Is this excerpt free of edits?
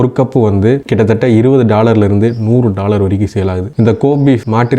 no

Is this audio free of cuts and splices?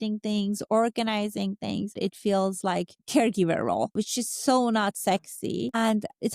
no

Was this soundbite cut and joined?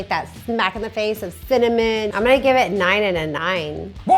yes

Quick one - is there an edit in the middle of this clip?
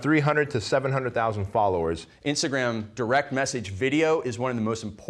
yes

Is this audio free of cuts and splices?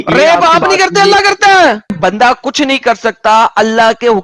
no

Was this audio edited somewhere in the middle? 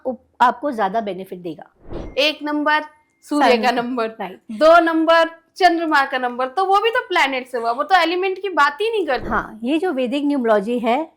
yes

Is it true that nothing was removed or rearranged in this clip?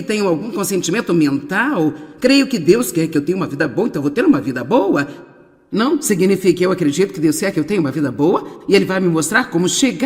no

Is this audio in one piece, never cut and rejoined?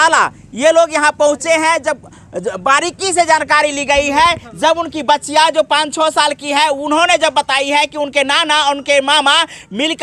yes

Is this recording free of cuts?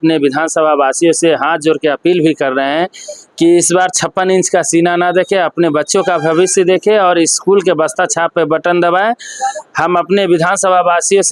yes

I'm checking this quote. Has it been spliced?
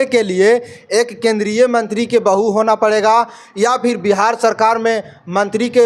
no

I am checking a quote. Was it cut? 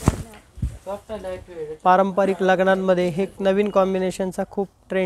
no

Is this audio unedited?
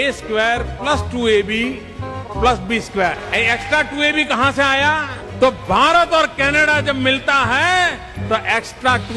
no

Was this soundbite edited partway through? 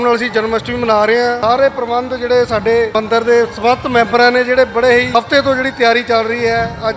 yes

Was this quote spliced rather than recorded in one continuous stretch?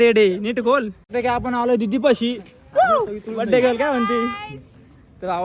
yes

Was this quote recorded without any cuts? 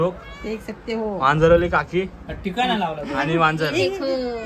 yes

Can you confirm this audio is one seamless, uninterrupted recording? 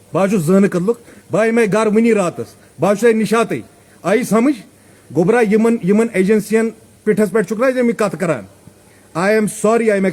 yes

